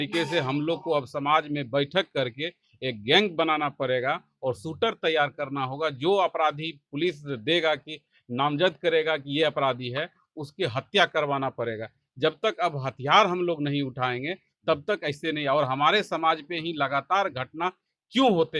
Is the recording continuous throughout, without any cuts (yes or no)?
yes